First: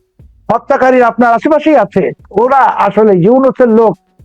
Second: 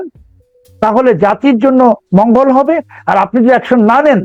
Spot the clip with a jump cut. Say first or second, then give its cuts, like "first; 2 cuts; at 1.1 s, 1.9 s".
first; 1 cut; at 2.2 s